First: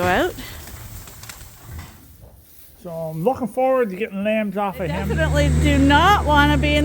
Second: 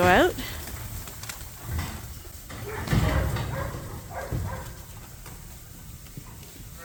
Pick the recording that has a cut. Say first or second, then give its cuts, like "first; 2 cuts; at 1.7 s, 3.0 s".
first; 2 cuts; at 2.0 s, 5.1 s